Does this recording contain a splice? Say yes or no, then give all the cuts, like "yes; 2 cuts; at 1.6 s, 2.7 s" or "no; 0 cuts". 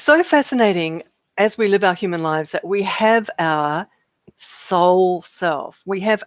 yes; 1 cut; at 1.1 s